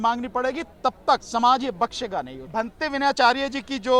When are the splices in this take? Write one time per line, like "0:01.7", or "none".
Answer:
0:01.2
0:02.4

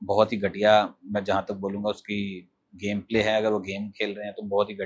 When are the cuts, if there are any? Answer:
none

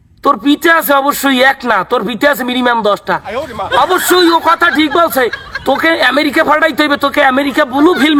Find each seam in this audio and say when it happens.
none

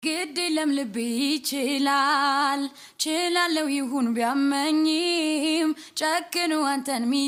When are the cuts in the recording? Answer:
none

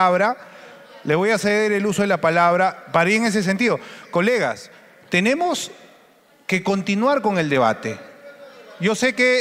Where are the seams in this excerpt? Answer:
none

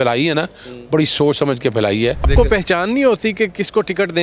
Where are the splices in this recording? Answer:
0:02.3

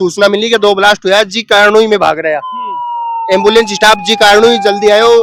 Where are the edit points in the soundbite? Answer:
none

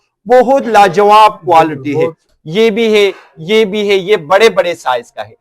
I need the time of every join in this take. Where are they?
0:02.3

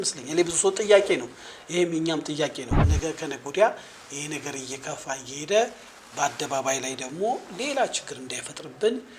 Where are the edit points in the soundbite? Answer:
0:02.8

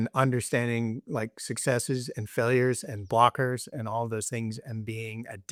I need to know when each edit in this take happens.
none

